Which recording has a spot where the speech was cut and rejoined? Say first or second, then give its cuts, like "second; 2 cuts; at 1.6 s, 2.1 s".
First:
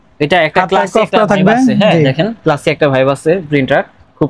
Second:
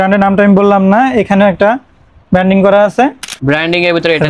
second; 1 cut; at 3.3 s